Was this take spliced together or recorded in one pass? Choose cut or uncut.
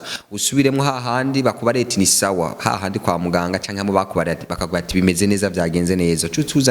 uncut